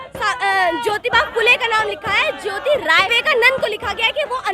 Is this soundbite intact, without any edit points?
no; 1 cut; at 3.1 s

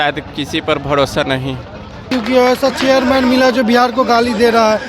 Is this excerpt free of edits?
no; 1 cut; at 2.1 s

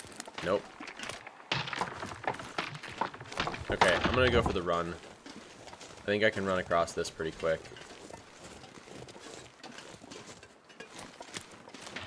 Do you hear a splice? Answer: no; 0 cuts

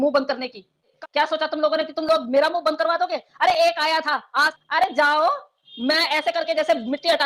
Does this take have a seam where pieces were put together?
yes; 2 cuts; at 0.9 s, 4.5 s

